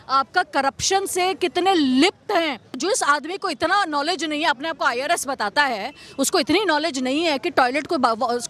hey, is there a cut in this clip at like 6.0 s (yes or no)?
no